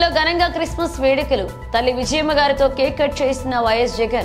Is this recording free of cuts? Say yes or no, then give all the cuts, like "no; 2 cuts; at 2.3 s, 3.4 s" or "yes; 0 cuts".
yes; 0 cuts